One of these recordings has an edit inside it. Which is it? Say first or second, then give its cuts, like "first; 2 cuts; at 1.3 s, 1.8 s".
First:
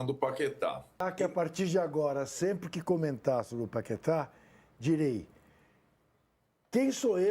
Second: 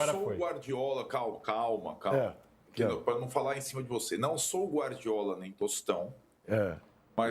first; 1 cut; at 1.0 s